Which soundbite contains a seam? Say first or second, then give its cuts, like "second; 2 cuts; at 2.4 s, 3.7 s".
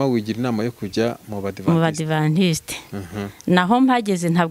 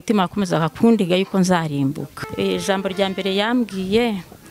second; 1 cut; at 2.1 s